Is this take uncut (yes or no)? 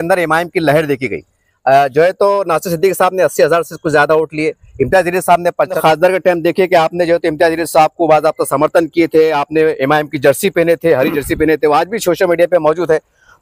no